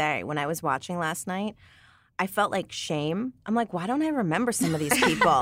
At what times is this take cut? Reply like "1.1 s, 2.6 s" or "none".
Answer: none